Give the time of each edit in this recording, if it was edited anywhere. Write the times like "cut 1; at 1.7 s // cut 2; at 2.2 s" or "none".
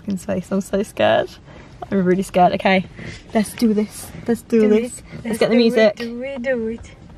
none